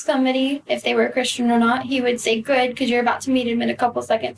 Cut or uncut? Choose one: uncut